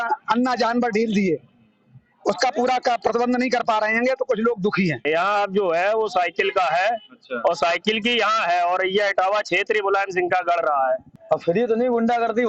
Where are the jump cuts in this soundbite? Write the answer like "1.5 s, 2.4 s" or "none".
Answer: 5.0 s, 11.1 s